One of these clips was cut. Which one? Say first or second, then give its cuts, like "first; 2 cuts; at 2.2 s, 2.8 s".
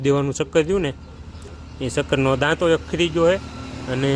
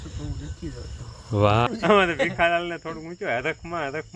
second; 1 cut; at 1.7 s